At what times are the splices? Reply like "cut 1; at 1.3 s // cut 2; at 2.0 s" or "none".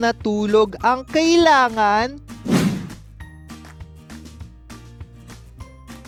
none